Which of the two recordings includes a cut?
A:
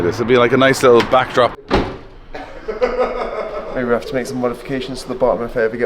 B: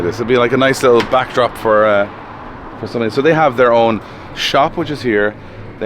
A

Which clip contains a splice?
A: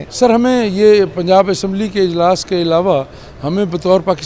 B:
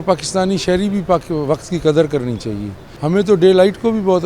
B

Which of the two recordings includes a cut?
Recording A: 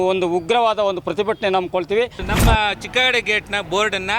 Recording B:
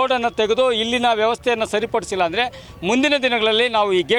A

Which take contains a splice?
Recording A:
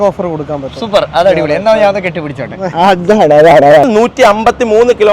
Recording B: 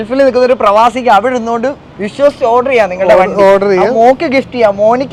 A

